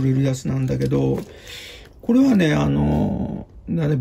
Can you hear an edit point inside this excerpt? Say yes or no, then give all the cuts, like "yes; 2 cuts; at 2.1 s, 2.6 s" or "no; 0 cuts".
no; 0 cuts